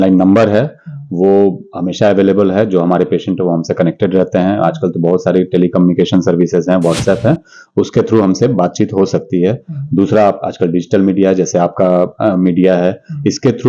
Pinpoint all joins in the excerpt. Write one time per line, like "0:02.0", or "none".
none